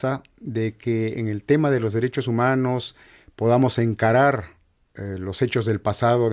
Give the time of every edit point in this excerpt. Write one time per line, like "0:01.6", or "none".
0:01.0